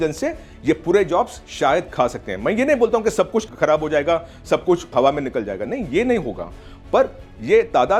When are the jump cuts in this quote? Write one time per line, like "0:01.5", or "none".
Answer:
none